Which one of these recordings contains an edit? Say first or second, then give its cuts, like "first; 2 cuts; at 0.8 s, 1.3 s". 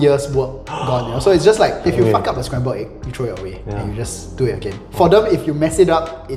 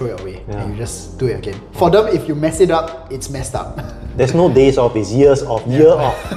first; 1 cut; at 1.9 s